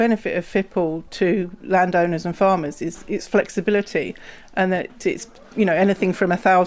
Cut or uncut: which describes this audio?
uncut